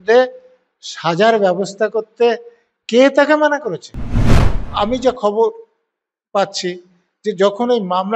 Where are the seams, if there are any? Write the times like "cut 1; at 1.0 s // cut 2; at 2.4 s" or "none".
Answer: cut 1; at 4.2 s